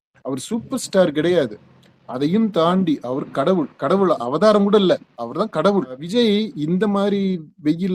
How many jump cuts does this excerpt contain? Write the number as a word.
one